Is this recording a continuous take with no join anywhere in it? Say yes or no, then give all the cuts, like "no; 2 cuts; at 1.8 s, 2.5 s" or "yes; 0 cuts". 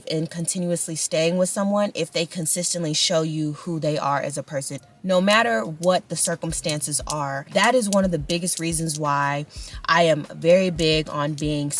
yes; 0 cuts